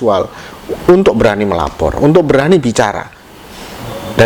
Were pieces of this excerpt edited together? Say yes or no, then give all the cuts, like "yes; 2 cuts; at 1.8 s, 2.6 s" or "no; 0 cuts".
no; 0 cuts